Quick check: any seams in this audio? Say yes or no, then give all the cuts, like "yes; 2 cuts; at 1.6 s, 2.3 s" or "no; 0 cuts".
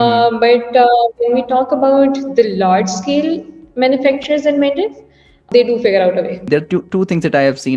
yes; 2 cuts; at 5.5 s, 6.5 s